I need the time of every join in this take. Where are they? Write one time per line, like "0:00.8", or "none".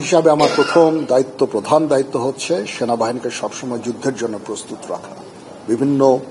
none